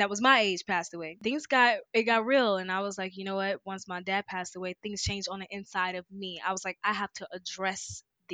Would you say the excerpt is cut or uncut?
cut